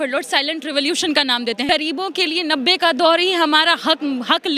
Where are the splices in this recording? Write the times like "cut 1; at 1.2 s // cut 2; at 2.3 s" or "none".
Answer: cut 1; at 1.7 s